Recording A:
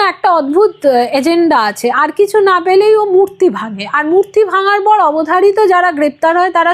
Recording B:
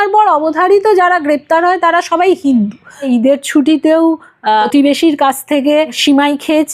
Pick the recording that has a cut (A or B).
B